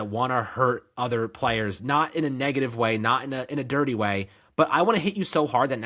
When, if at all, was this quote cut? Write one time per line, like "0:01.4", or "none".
none

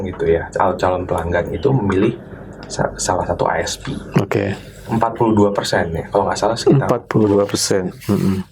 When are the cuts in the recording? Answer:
none

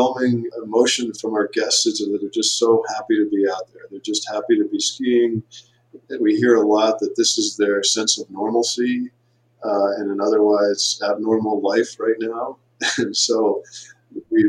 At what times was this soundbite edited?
0:01.0

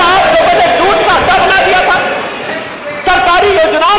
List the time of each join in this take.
none

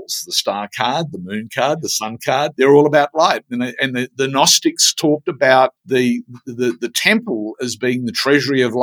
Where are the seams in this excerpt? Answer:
0:02.5
0:05.8

